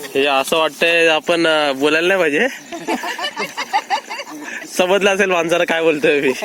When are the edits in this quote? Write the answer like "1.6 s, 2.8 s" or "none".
none